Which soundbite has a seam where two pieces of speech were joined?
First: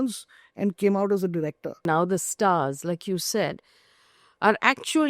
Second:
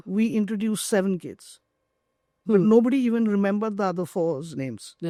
first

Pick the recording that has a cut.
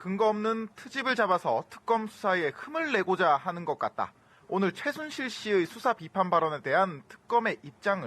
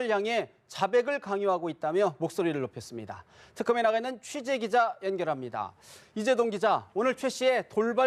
first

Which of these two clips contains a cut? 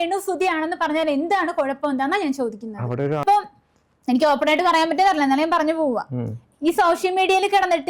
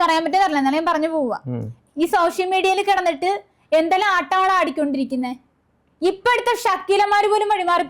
first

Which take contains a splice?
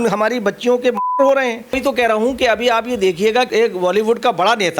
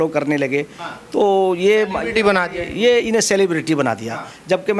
first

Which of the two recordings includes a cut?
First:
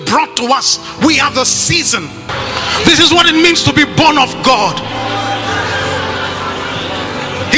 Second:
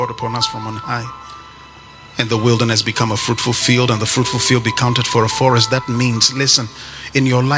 first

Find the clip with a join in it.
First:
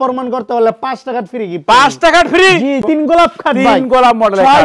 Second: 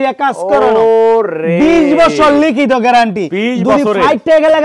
first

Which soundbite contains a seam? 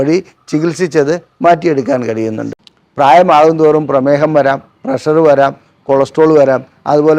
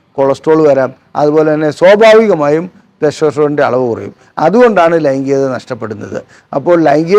first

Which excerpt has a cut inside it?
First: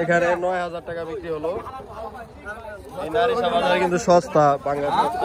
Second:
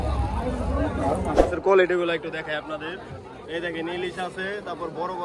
second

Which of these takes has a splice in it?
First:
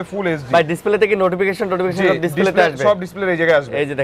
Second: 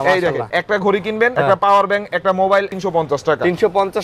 second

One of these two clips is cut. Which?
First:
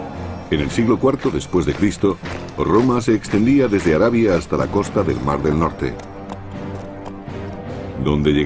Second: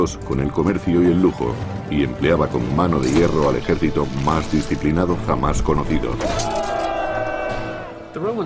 second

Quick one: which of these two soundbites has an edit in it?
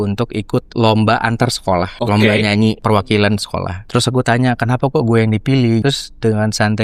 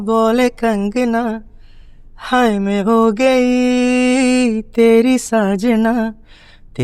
first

